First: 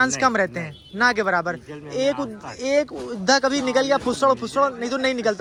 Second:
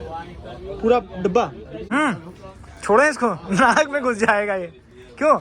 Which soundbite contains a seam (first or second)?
second